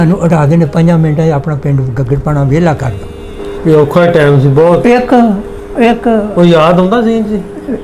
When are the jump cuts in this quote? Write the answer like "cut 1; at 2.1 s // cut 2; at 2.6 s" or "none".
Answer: cut 1; at 3.4 s